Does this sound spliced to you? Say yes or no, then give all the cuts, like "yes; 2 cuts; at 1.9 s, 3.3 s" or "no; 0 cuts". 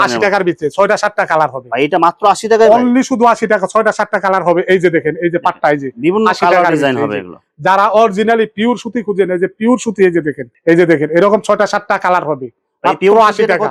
no; 0 cuts